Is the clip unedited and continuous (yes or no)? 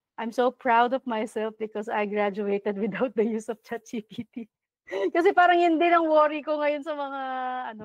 yes